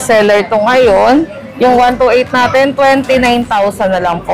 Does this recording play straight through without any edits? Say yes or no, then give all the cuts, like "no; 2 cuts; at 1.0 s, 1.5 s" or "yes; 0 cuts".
yes; 0 cuts